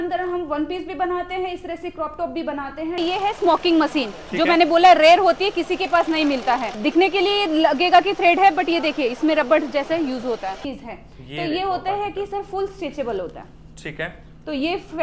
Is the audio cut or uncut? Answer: cut